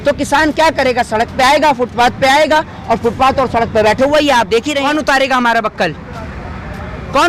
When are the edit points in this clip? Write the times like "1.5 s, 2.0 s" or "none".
4.9 s